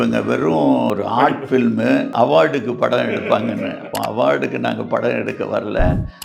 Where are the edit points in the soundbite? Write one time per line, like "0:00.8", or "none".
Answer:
0:00.9
0:02.1
0:03.9

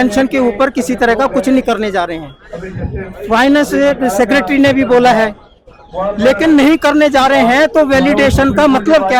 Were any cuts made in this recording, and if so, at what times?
none

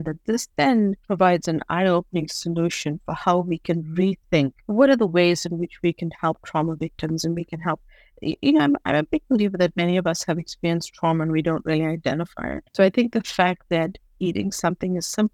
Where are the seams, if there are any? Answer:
0:01.0
0:04.6
0:12.8

